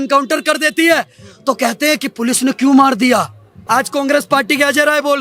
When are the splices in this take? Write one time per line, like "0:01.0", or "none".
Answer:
0:03.6